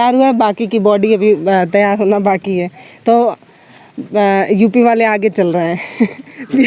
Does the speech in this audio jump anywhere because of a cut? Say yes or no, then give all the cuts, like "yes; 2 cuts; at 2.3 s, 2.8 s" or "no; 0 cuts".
no; 0 cuts